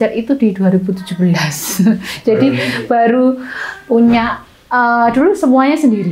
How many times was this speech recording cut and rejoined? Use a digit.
0